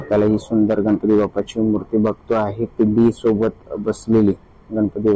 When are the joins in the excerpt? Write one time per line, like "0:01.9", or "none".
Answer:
none